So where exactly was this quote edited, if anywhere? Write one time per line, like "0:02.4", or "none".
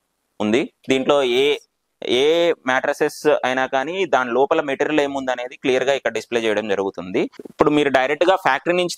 0:07.4